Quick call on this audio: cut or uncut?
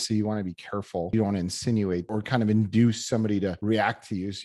cut